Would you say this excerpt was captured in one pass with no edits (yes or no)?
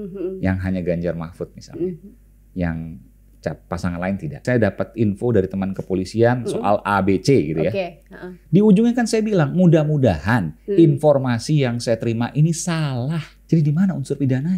no